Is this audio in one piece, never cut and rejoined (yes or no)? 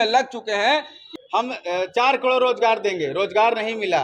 no